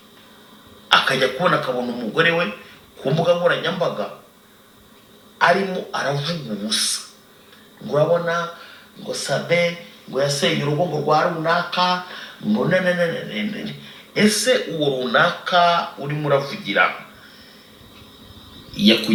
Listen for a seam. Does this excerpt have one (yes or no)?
no